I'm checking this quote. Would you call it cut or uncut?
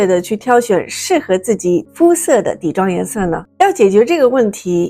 uncut